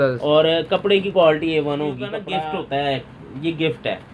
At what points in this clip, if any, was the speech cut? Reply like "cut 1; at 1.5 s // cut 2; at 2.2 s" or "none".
cut 1; at 2.2 s

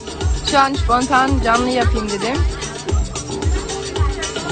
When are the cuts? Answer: none

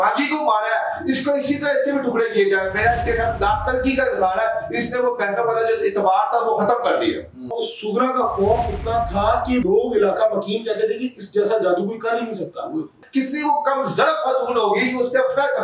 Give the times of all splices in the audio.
cut 1; at 7.5 s // cut 2; at 9.6 s // cut 3; at 13.0 s

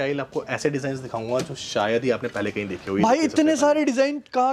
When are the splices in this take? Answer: none

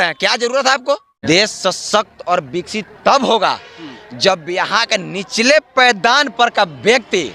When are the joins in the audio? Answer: cut 1; at 1.1 s

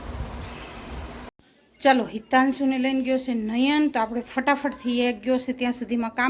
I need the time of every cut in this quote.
cut 1; at 1.3 s

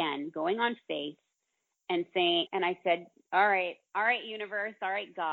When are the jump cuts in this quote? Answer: cut 1; at 2.6 s

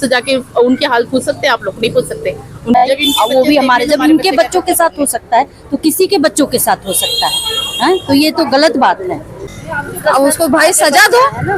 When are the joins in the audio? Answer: cut 1; at 2.8 s // cut 2; at 9.5 s

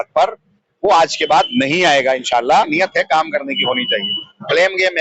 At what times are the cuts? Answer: cut 1; at 2.7 s

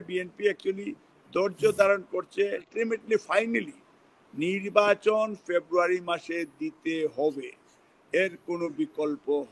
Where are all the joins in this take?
cut 1; at 2.7 s

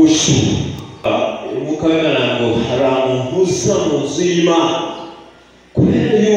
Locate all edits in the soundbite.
cut 1; at 1.0 s

